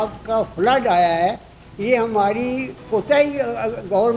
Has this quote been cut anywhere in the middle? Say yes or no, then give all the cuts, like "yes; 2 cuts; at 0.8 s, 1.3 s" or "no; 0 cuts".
no; 0 cuts